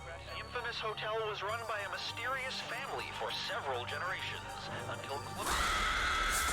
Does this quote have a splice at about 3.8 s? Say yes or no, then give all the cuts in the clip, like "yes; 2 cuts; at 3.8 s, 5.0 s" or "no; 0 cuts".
no; 1 cut; at 5.4 s